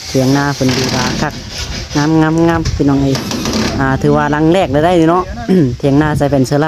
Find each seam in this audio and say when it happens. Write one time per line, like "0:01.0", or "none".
none